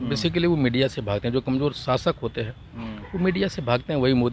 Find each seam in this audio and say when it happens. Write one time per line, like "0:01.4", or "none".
none